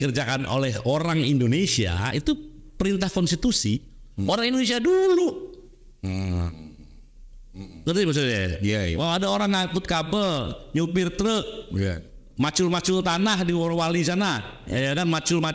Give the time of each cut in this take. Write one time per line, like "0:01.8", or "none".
none